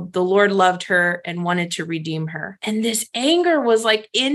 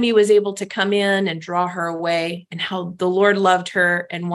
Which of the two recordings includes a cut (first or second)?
first